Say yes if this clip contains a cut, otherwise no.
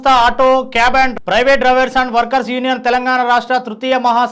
no